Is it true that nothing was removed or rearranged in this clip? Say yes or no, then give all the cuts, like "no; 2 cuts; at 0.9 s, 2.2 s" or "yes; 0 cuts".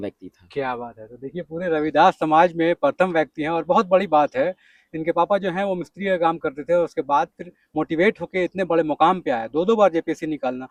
yes; 0 cuts